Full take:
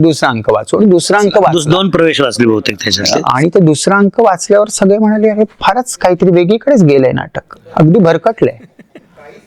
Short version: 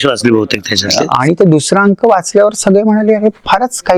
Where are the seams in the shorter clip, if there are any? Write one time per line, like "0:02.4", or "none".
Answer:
none